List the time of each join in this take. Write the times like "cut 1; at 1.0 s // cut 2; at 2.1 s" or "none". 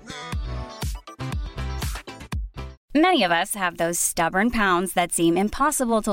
cut 1; at 2.8 s